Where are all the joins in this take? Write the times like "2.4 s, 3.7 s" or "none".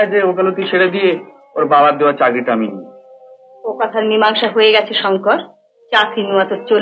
none